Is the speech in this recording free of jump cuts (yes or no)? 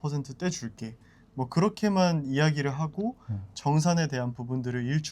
yes